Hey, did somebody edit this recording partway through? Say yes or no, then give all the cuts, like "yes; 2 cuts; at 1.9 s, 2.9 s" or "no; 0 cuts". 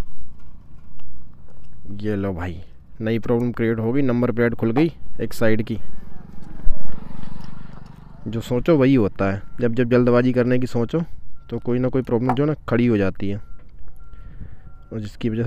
no; 0 cuts